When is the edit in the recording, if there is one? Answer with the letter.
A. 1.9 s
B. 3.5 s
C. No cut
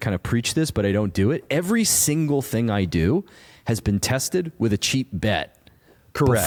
C